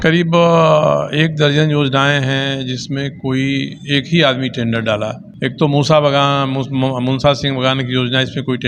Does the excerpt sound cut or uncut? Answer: cut